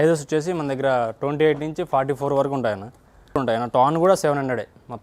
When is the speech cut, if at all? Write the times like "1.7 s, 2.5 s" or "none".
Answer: 3.4 s